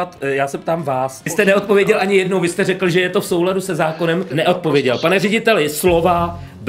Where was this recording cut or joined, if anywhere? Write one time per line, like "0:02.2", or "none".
0:01.3
0:04.3